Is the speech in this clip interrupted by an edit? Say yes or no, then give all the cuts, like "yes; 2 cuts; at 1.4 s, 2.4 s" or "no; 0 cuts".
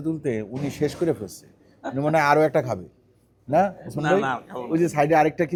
no; 0 cuts